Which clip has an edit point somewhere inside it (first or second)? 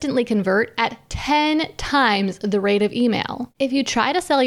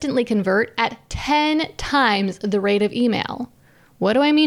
first